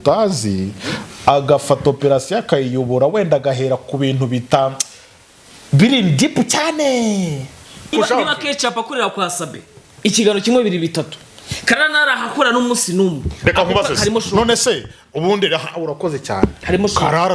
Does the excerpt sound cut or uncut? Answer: cut